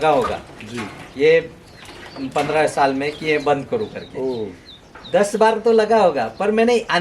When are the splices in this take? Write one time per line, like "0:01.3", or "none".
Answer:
none